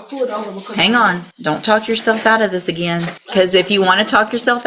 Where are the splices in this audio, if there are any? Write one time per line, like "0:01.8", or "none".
0:01.3
0:03.2